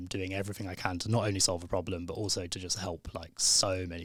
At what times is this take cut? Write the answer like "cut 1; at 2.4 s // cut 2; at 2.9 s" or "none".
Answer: none